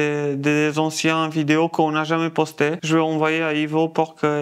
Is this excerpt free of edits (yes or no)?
yes